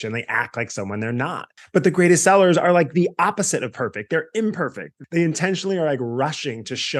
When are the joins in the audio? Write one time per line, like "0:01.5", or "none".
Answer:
0:01.5
0:04.9